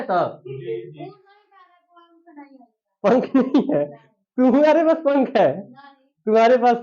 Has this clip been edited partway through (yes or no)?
no